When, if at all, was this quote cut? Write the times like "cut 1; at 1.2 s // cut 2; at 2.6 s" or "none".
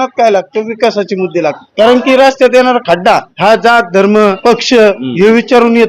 cut 1; at 3.3 s // cut 2; at 4.4 s